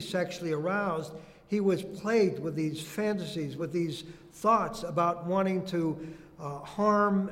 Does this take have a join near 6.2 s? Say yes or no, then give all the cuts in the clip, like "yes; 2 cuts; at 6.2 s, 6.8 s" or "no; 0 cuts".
no; 1 cut; at 3.5 s